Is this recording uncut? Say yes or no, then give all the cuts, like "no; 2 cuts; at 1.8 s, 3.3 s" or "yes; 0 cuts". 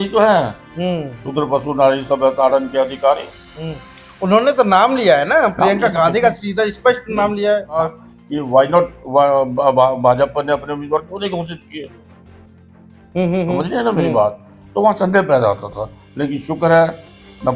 no; 1 cut; at 7.8 s